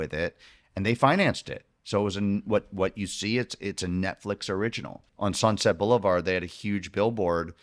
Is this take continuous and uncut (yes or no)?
no